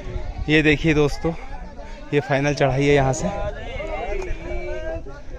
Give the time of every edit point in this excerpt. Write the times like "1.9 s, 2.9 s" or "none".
none